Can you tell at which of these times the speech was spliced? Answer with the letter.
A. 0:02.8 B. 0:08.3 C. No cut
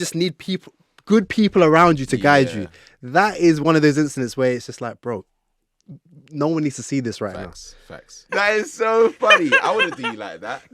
B